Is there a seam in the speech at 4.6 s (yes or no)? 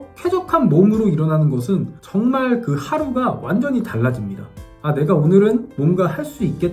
yes